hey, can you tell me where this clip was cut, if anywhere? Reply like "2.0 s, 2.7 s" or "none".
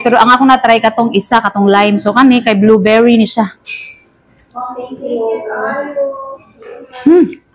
none